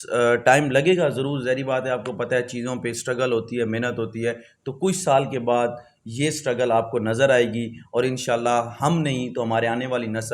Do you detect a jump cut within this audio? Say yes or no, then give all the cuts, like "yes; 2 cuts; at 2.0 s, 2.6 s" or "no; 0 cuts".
no; 0 cuts